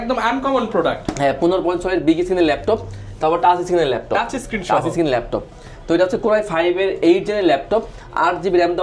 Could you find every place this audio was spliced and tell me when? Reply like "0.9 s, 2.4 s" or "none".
none